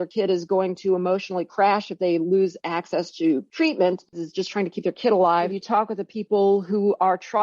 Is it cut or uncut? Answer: cut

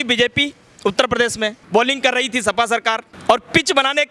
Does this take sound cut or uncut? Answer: cut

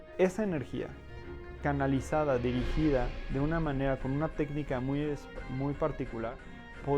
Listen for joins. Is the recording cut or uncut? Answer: uncut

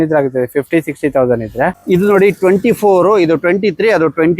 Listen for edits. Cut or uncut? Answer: cut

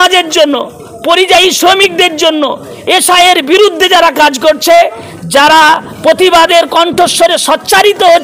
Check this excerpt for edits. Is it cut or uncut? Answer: uncut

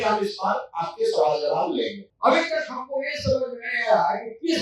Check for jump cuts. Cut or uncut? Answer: cut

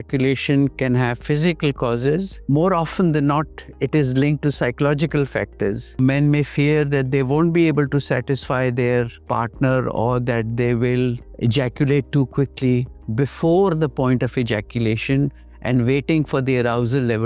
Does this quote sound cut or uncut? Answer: cut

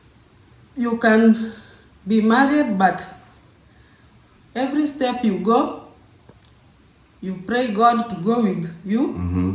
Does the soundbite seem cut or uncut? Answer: uncut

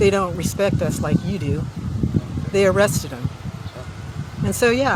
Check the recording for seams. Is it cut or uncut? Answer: uncut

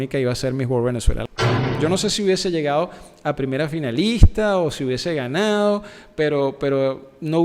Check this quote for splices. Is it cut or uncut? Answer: cut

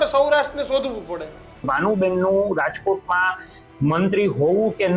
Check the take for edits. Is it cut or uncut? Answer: cut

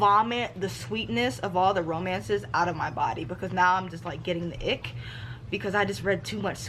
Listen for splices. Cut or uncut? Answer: uncut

